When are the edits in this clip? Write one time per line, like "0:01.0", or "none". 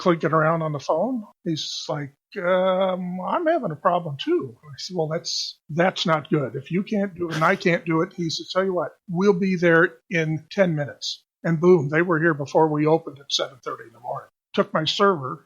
0:01.3